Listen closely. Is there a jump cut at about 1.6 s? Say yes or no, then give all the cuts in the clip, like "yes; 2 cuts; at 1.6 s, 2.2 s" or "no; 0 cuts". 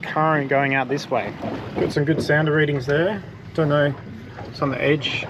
yes; 1 cut; at 1.6 s